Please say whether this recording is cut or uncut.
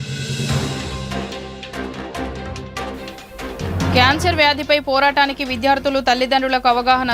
cut